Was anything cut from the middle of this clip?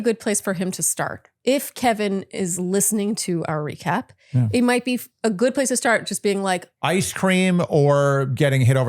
yes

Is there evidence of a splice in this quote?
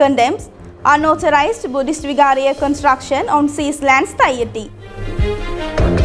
yes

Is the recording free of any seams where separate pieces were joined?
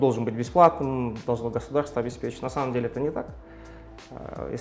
yes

